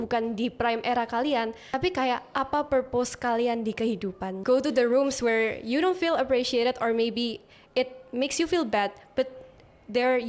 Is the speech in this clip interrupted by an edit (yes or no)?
yes